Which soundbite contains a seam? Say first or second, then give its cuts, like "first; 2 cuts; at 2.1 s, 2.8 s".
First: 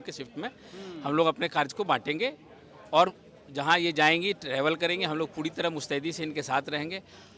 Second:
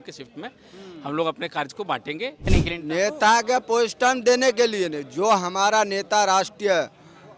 second; 1 cut; at 2.5 s